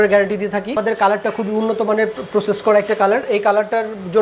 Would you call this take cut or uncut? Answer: cut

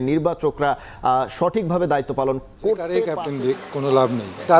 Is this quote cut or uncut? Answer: cut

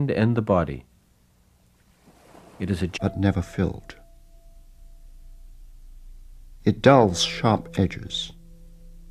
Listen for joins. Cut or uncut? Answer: uncut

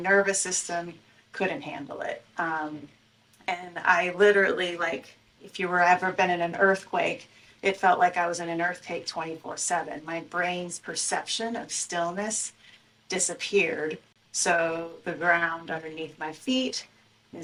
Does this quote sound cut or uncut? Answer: uncut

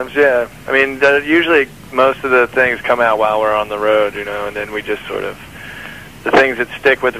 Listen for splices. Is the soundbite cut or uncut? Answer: cut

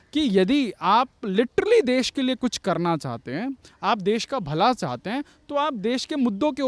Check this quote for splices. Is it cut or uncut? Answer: uncut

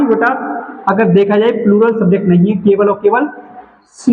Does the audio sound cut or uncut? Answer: uncut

